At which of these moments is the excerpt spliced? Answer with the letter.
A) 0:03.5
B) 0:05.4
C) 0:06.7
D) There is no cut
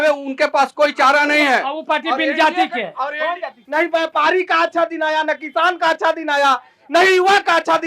A